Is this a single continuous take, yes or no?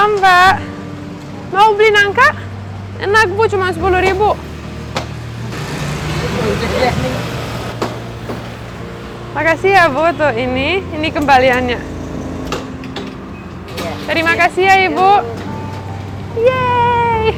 yes